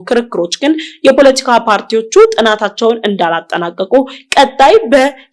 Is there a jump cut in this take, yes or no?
no